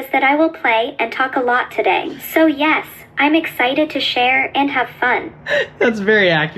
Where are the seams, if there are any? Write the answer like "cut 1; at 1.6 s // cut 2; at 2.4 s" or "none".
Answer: cut 1; at 2.2 s // cut 2; at 5.3 s